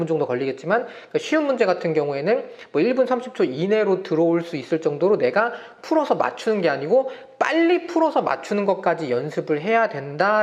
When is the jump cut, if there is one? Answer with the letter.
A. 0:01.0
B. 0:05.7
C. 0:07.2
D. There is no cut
D